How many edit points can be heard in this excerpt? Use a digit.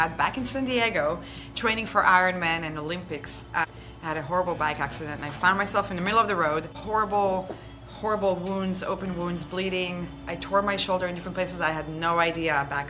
2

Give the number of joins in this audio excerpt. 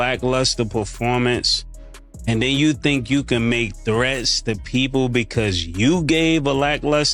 0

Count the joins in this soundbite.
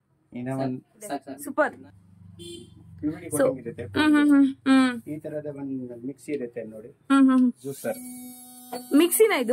1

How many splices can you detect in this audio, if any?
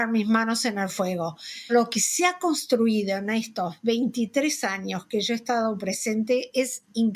1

